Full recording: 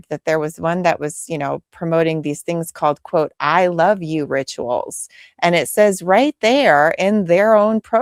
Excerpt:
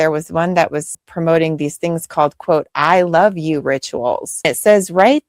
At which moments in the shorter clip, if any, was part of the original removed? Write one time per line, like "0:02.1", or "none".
0:01.0
0:04.5